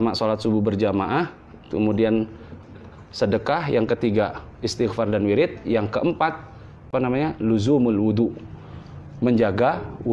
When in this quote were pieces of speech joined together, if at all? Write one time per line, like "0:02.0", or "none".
0:02.4
0:06.7